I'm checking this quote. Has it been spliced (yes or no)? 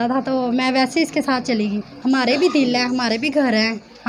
yes